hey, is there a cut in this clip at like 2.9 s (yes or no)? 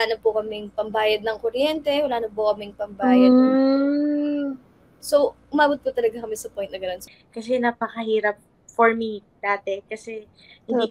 no